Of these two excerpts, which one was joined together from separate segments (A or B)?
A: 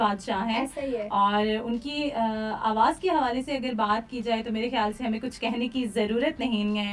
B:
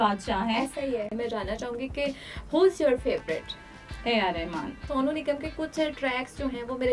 B